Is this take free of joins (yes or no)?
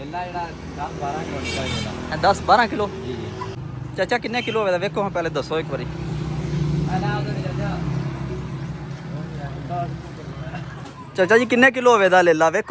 no